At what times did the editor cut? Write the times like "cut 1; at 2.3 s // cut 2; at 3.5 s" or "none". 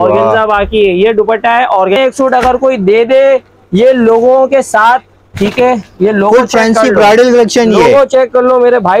cut 1; at 2.0 s

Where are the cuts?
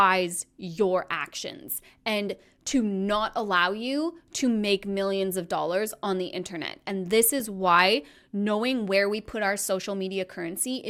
none

